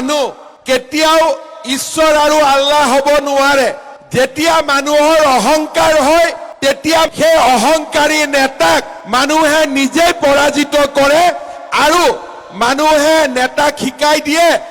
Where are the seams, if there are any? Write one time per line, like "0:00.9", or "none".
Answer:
none